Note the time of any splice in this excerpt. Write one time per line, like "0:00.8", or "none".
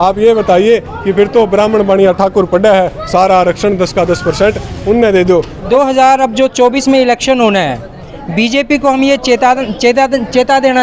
0:05.7